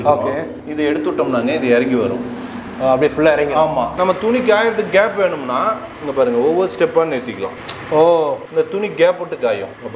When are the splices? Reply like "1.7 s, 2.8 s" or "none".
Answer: 3.9 s